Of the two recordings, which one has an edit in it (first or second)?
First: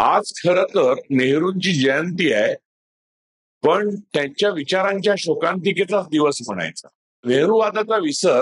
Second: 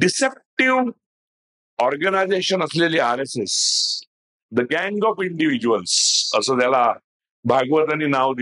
first